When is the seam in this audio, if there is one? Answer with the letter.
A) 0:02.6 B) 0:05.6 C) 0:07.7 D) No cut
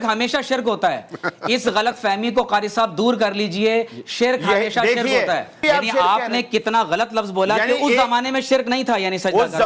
B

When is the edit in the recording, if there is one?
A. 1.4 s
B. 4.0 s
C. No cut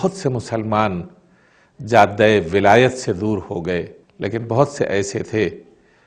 B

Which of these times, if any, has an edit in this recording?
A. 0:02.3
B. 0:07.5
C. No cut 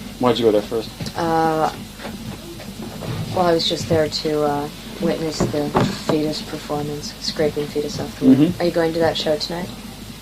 B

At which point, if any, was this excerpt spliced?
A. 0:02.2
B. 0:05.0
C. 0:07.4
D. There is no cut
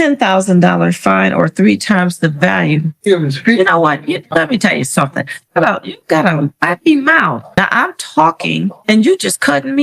C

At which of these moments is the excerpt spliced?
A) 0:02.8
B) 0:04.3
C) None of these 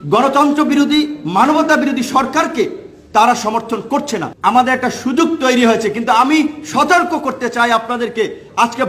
B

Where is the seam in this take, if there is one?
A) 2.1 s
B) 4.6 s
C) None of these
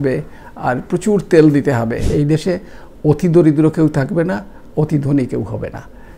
A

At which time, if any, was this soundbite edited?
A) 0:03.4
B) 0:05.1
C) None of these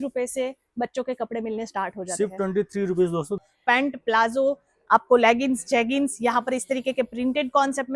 A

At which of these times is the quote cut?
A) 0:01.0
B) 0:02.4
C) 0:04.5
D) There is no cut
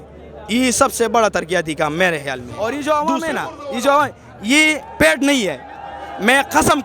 B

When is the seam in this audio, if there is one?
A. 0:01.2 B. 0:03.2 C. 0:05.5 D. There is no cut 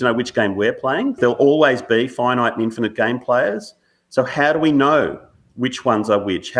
A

